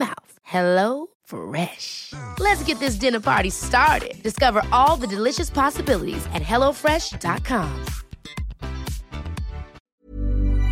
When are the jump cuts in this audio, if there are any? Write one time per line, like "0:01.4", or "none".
0:09.8